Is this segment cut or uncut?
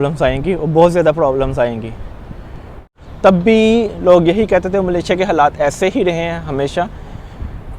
cut